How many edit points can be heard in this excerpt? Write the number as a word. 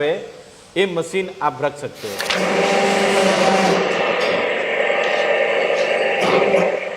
one